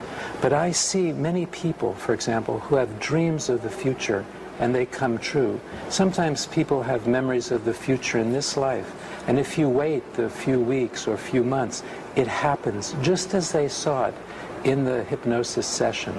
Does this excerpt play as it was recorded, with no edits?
yes; 0 cuts

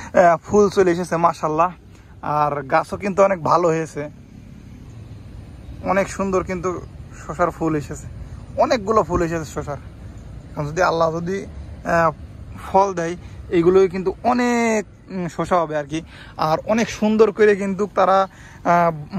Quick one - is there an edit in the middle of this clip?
no; 0 cuts

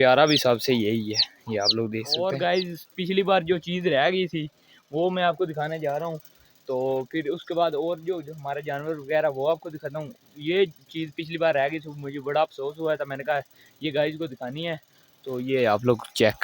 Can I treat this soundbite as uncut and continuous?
no; 1 cut; at 2.4 s

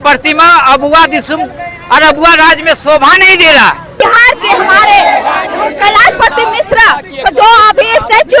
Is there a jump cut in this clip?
yes; 1 cut; at 4.0 s

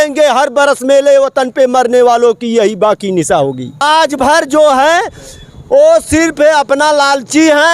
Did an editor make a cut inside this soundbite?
yes; 1 cut; at 3.8 s

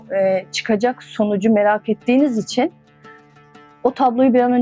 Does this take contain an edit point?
no; 0 cuts

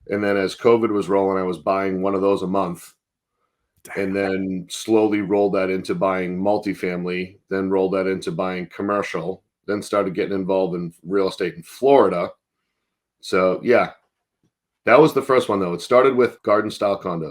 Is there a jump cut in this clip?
yes; 1 cut; at 16.4 s

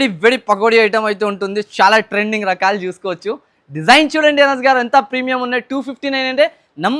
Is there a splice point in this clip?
no; 0 cuts

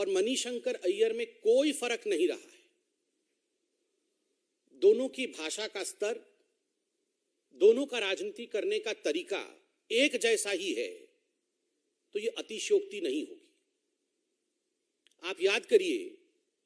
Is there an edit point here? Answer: no; 0 cuts

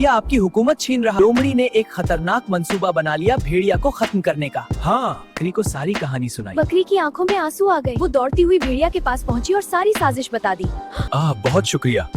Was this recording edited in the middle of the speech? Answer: yes; 3 cuts; at 1.2 s, 5.4 s, 11.0 s

